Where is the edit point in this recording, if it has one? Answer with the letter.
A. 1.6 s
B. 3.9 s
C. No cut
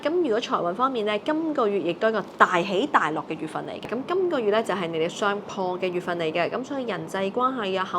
B